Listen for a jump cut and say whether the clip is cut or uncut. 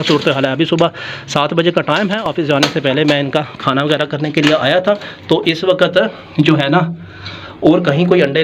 uncut